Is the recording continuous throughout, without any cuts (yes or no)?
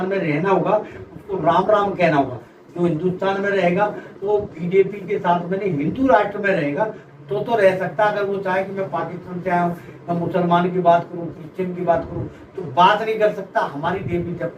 yes